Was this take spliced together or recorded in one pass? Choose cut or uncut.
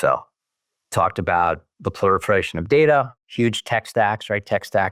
uncut